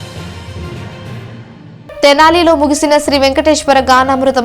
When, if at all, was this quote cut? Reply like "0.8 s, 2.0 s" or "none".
1.3 s